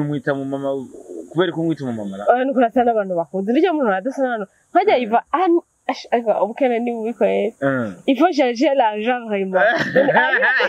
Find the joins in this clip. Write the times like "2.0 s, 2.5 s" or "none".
none